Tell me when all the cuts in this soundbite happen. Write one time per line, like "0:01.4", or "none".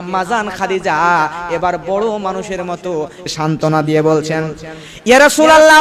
0:03.3